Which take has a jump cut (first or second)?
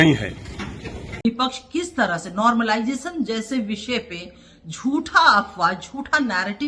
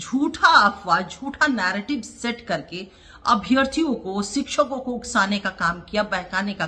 first